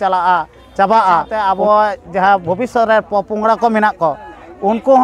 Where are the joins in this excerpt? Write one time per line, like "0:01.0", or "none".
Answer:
0:01.3

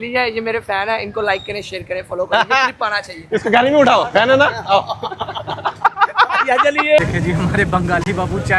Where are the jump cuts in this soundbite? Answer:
0:02.7
0:07.0

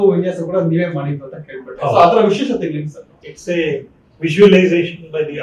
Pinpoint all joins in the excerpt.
none

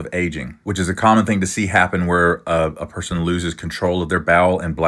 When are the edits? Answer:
none

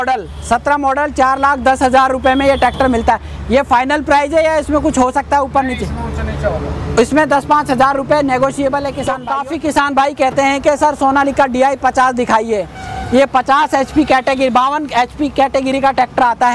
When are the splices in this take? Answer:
0:09.2

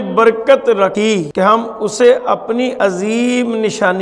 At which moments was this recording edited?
0:01.1
0:02.7

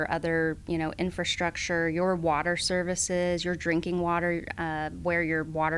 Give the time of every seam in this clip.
none

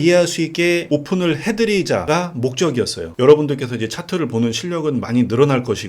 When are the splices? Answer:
0:00.7
0:02.0
0:03.1

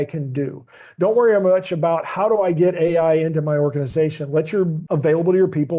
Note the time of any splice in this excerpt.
0:04.8

